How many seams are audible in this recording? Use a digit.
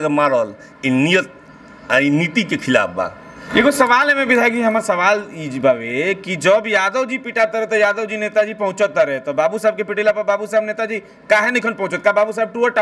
1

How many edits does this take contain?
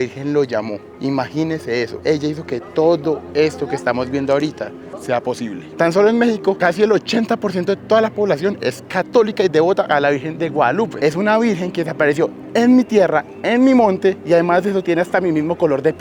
4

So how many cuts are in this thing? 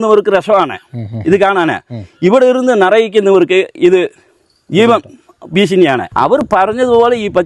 1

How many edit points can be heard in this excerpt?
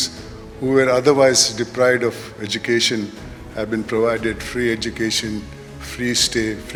0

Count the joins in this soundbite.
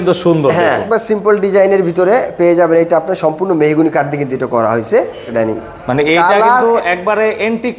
2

